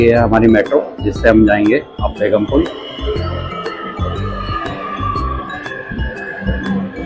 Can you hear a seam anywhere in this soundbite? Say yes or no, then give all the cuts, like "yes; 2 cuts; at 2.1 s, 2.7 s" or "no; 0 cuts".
no; 0 cuts